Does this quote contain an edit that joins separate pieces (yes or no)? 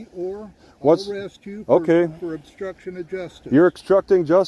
no